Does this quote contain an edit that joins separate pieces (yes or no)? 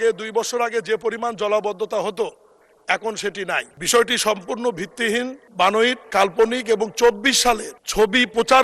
yes